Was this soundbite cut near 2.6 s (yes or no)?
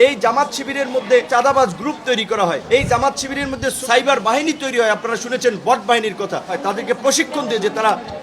yes